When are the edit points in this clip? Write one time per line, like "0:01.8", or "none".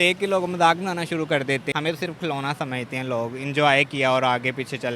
0:01.7